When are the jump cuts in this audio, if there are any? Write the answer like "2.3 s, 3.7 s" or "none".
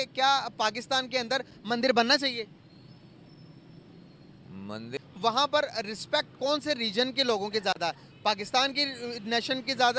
4.9 s